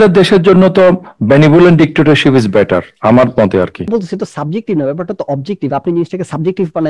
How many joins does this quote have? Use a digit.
1